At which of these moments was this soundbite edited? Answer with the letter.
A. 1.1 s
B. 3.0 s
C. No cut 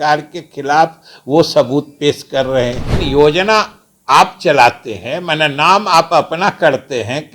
B